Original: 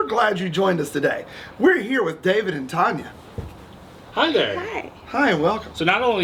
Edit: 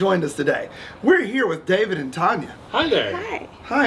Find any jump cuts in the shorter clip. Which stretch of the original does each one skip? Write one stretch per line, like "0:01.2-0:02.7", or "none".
0:03.1-0:04.0